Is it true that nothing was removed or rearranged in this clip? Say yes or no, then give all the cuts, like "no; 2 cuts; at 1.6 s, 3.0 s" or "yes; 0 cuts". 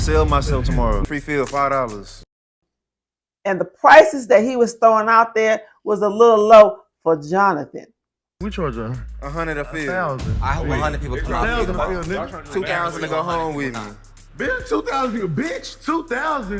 no; 1 cut; at 1.0 s